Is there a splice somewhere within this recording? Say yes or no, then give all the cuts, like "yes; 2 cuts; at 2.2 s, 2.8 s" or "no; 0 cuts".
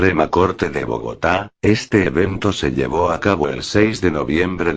no; 0 cuts